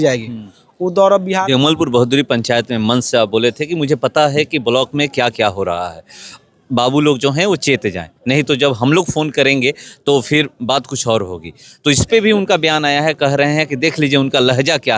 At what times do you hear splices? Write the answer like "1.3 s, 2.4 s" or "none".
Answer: 1.4 s